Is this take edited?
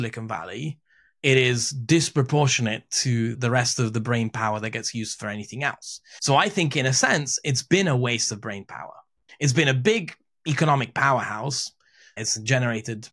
yes; 2 cuts; at 9.2 s, 12.2 s

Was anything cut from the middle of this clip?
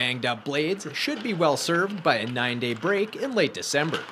no; 0 cuts

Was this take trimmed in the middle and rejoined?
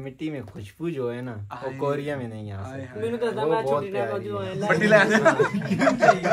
no; 0 cuts

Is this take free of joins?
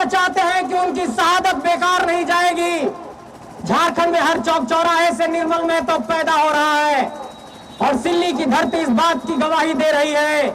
yes; 0 cuts

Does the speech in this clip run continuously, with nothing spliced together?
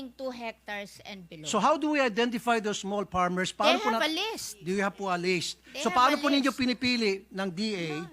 yes; 0 cuts

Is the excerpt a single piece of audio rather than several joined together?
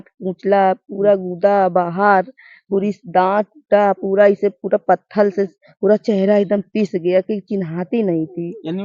yes; 0 cuts

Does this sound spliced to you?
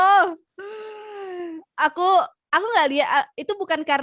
no; 0 cuts

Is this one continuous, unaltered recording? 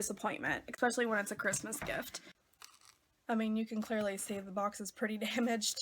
no; 1 cut; at 2.2 s

